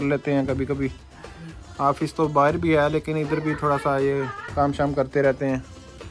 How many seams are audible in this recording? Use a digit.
0